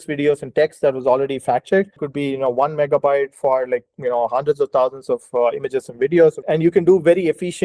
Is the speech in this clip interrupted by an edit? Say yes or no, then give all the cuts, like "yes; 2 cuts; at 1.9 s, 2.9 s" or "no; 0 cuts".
yes; 2 cuts; at 2.0 s, 6.4 s